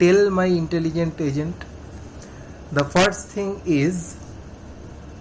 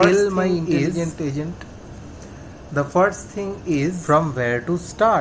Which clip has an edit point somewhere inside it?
second; 1 cut; at 4.0 s

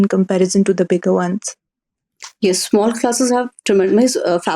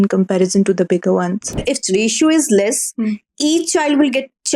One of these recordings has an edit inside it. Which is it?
second; 1 cut; at 1.6 s

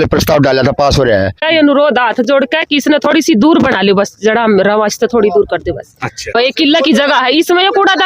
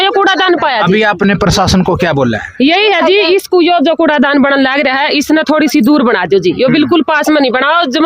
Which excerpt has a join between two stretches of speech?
first; 2 cuts; at 1.4 s, 6.3 s

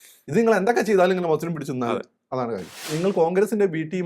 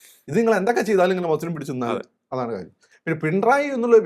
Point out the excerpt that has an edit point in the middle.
first; 1 cut; at 2.9 s

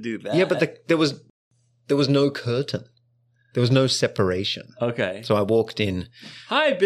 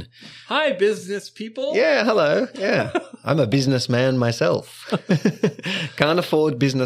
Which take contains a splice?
first; 1 cut; at 1.3 s

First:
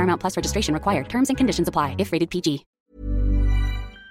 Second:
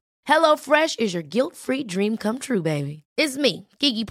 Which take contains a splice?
first; 1 cut; at 2.7 s

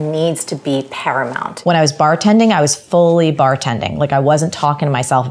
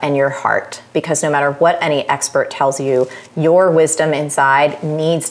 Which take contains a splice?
first; 1 cut; at 1.6 s

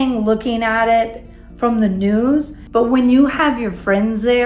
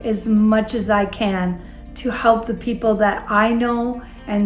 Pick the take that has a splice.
first; 1 cut; at 2.6 s

